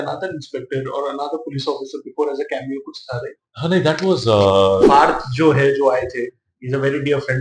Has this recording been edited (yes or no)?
yes